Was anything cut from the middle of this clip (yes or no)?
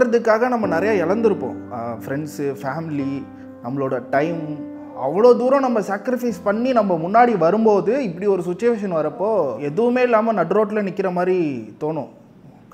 yes